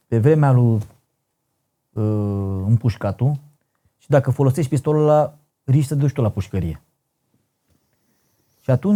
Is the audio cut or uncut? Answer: uncut